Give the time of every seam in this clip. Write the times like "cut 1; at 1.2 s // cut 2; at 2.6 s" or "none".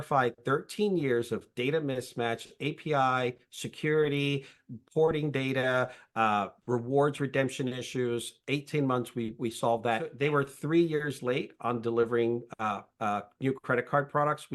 cut 1; at 10.1 s